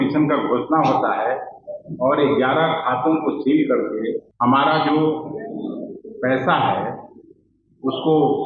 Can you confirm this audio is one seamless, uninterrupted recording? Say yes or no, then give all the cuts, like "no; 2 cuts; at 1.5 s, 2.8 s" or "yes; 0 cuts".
no; 1 cut; at 4.3 s